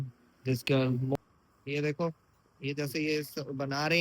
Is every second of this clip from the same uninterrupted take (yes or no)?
no